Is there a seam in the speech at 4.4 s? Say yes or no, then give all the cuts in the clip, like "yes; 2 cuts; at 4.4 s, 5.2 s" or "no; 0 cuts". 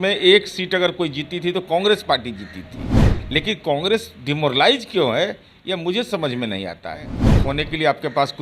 no; 1 cut; at 7.2 s